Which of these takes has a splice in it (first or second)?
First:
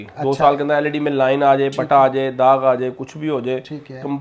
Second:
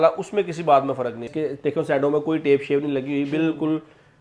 second